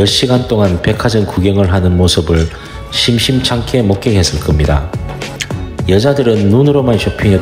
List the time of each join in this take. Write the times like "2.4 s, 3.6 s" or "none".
none

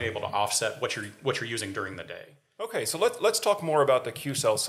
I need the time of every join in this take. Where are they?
2.7 s

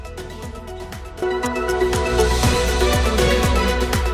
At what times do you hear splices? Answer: 1.2 s

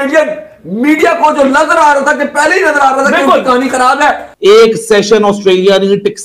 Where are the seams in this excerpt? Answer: 4.3 s

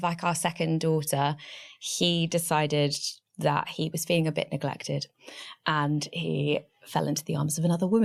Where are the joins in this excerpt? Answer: none

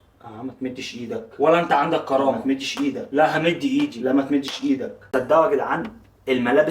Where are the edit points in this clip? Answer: 5.0 s

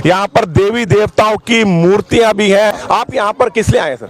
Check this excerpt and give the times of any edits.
2.8 s

